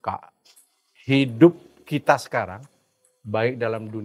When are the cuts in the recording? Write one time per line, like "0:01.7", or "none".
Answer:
none